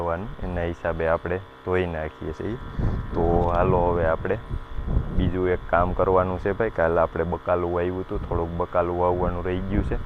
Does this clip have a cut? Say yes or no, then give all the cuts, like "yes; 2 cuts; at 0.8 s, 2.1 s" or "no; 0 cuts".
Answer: no; 0 cuts